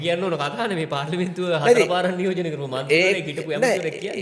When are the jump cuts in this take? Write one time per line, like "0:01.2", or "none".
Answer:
none